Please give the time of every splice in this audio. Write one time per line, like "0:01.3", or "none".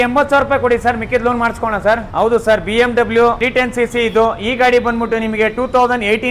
0:02.1
0:03.4